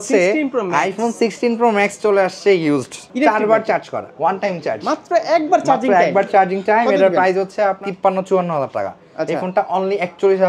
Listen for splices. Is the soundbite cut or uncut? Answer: cut